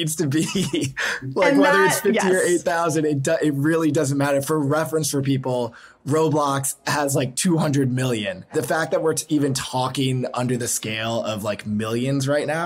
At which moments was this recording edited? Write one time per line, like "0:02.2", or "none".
0:08.5